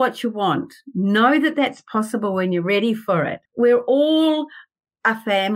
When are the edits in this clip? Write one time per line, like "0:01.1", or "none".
0:03.4